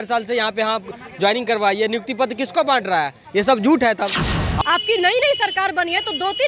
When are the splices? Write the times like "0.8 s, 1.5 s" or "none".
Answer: 4.4 s